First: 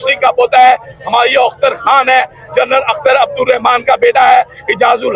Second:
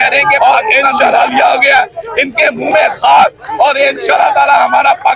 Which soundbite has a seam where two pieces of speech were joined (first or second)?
second